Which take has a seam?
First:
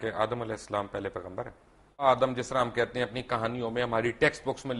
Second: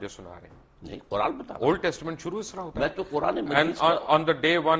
first; 1 cut; at 2.0 s

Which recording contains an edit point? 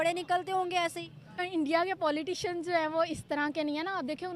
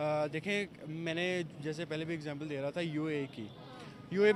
first; 1 cut; at 1.4 s

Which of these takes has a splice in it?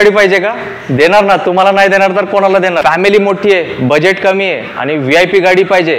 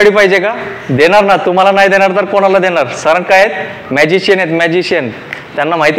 first; 1 cut; at 2.8 s

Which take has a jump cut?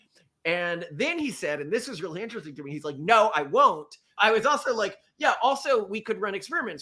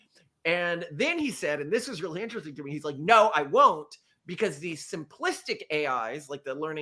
first; 1 cut; at 4.0 s

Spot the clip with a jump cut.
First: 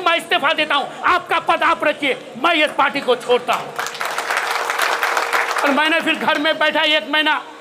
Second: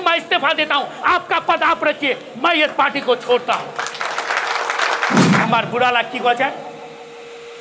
second; 1 cut; at 5.5 s

